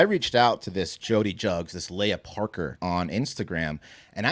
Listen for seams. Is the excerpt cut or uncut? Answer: cut